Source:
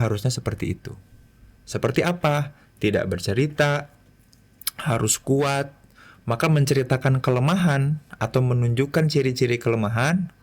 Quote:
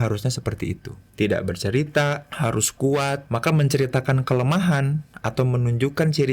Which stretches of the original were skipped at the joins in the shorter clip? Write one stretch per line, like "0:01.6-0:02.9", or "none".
0:01.0-0:02.6
0:03.9-0:04.7
0:05.7-0:06.2